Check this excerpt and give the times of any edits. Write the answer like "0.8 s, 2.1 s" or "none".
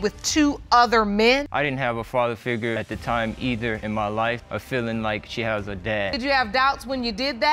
1.4 s, 2.8 s, 4.4 s, 6.1 s